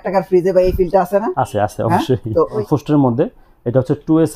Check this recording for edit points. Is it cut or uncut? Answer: cut